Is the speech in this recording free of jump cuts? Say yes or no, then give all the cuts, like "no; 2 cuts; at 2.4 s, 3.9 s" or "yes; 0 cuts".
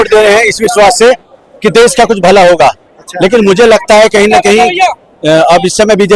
yes; 0 cuts